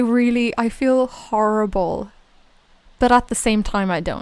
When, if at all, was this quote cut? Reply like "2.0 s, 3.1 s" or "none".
none